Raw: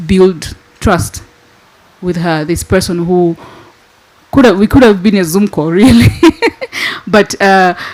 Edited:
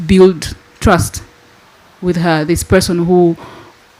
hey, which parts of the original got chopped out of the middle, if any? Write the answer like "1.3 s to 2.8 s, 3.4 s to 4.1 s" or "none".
none